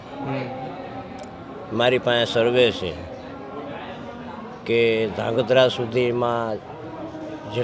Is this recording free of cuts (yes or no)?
yes